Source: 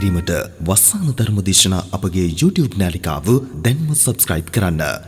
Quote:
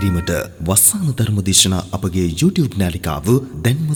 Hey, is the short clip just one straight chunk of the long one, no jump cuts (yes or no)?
yes